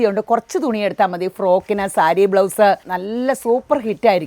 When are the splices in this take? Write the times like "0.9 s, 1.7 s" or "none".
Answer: 2.9 s